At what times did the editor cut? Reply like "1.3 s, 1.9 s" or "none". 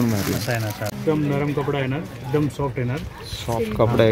1.0 s

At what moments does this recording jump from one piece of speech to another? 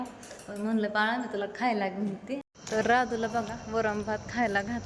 2.5 s

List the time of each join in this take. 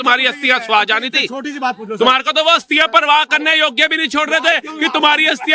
none

